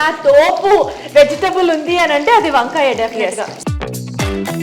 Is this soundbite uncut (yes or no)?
no